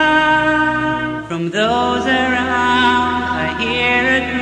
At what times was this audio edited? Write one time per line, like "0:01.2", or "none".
0:01.0